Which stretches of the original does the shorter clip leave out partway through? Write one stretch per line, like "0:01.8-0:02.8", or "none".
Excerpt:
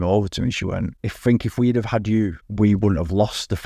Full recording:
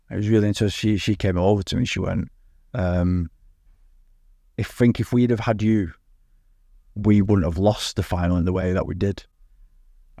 0:02.4-0:04.6
0:06.0-0:06.9